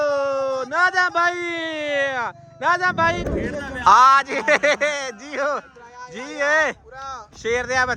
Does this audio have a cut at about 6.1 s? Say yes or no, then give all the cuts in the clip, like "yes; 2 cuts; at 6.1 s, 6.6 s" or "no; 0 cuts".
no; 1 cut; at 3.2 s